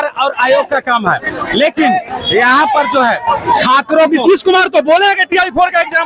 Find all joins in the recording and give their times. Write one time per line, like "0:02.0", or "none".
none